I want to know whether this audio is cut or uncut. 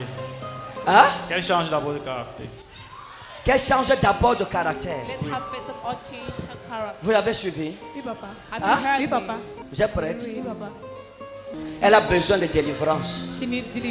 cut